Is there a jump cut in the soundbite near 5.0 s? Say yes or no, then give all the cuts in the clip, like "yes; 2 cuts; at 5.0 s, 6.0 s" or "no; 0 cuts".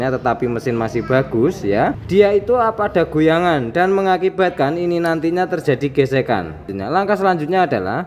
no; 2 cuts; at 2.0 s, 6.7 s